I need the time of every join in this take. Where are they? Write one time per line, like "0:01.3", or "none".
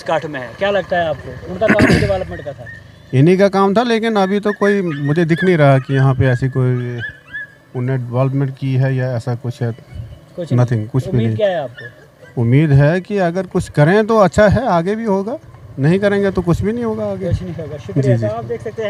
none